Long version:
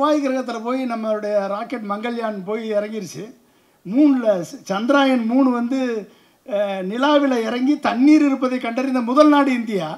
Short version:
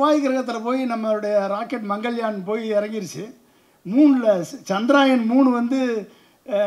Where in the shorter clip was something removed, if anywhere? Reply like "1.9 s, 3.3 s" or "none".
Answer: none